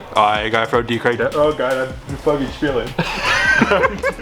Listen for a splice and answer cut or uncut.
uncut